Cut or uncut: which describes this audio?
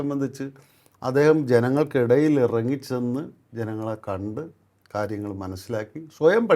uncut